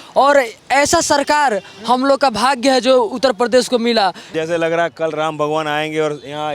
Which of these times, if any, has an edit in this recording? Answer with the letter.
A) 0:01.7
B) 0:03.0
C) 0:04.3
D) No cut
C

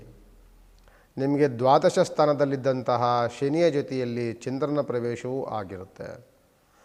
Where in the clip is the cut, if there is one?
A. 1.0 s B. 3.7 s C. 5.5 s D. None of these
D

